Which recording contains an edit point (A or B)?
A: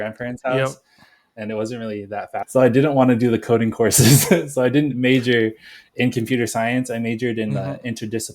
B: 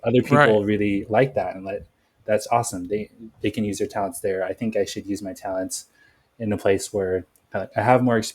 A